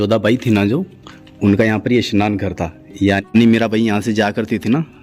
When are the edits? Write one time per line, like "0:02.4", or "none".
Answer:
0:03.2